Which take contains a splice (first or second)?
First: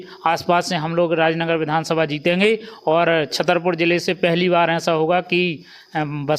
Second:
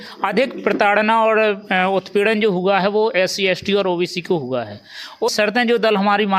second